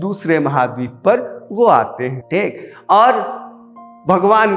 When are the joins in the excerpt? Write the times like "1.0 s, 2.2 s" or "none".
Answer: none